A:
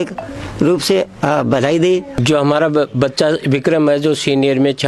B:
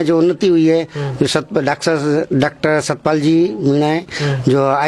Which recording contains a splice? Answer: A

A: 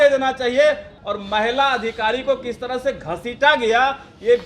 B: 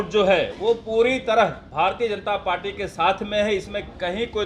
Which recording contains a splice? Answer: A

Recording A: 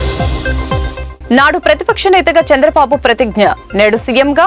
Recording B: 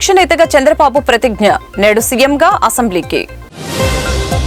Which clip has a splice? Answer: A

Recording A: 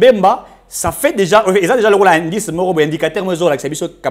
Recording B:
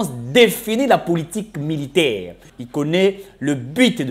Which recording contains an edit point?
B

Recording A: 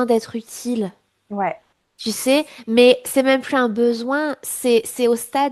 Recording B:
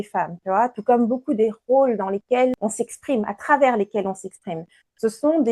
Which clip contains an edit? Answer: B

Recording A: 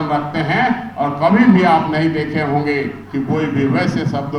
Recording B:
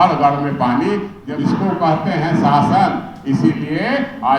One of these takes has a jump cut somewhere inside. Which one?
B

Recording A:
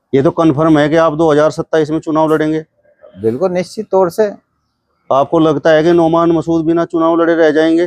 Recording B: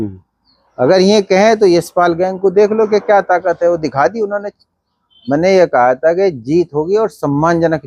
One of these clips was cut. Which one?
B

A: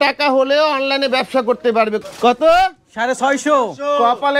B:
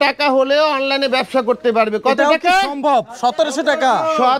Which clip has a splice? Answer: A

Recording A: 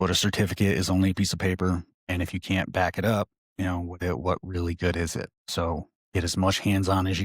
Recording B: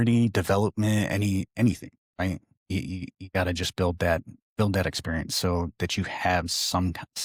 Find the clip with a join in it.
A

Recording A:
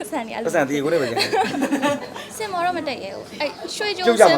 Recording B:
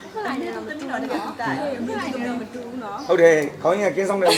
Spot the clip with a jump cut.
A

